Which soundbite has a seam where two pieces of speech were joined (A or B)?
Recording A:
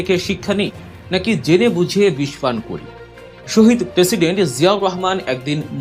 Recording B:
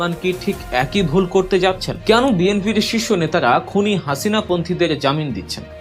B